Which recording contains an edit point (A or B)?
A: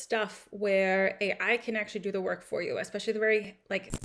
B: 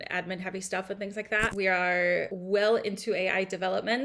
B